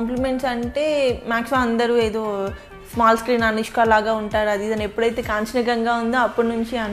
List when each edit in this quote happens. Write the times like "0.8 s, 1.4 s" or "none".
none